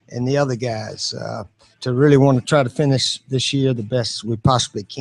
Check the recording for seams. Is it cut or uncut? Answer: cut